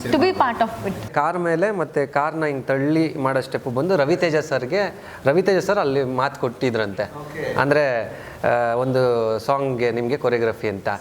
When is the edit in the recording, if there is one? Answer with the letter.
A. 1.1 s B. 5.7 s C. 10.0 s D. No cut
A